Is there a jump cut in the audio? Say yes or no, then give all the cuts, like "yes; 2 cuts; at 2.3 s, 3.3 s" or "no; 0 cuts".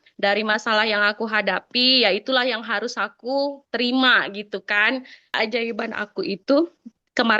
yes; 1 cut; at 5.3 s